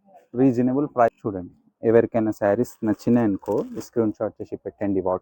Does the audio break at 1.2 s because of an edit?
yes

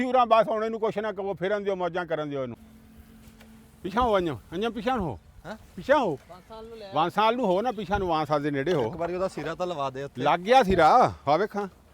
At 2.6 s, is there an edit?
yes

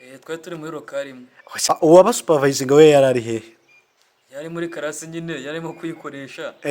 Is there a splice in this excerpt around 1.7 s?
yes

